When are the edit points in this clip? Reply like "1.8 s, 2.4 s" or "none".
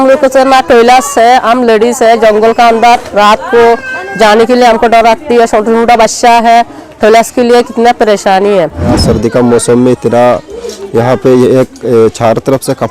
9.0 s